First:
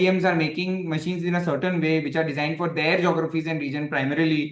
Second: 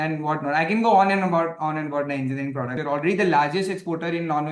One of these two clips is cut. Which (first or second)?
second